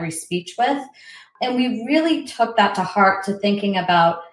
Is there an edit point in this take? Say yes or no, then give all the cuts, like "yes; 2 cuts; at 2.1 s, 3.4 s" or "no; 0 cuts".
yes; 1 cut; at 1.3 s